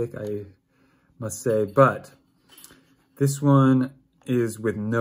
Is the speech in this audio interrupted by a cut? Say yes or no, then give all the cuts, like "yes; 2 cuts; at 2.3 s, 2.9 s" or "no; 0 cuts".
no; 0 cuts